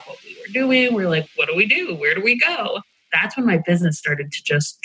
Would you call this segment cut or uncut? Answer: cut